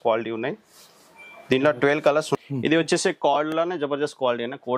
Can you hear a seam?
yes; 1 cut; at 2.4 s

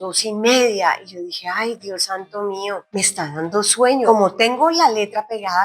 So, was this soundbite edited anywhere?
yes; 1 cut; at 4.1 s

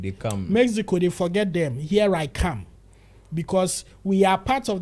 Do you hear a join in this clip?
no; 0 cuts

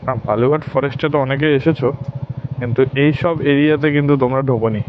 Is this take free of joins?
yes; 0 cuts

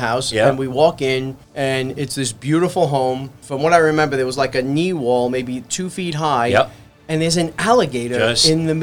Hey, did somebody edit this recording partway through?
yes; 2 cuts; at 1.4 s, 3.4 s

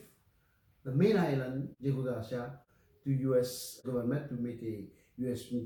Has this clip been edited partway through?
no; 0 cuts

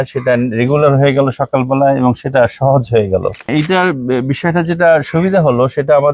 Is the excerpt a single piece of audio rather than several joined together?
no; 1 cut; at 3.5 s

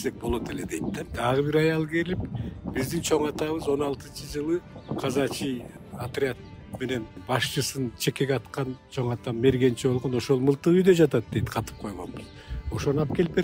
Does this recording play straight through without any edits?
no; 4 cuts; at 1.0 s, 4.8 s, 5.8 s, 7.2 s

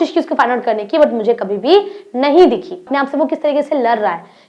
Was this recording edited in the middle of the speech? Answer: yes; 1 cut; at 2.9 s

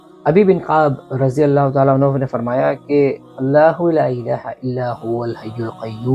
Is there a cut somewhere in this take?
no; 0 cuts

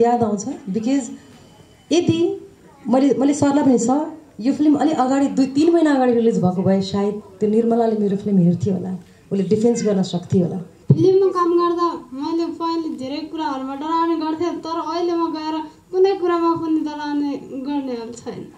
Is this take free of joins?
no; 1 cut; at 10.7 s

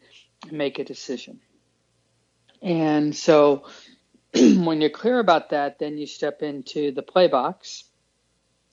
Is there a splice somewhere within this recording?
no; 0 cuts

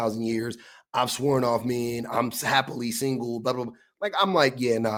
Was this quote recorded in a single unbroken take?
yes; 0 cuts

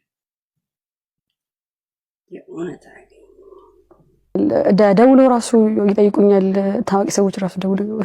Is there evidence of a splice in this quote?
yes; 1 cut; at 4.4 s

